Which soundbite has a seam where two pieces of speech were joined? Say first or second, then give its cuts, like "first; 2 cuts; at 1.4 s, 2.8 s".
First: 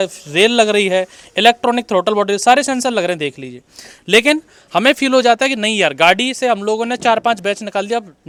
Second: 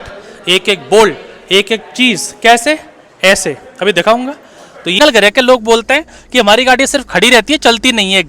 second; 1 cut; at 5.0 s